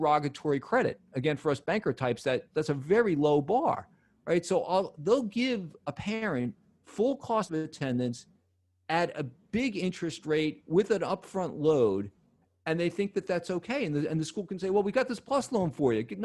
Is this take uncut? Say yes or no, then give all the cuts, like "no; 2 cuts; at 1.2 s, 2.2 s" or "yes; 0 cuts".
yes; 0 cuts